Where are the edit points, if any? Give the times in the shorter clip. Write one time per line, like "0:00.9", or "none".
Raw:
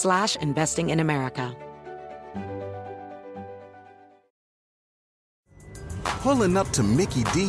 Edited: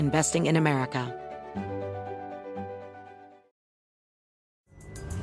0:01.1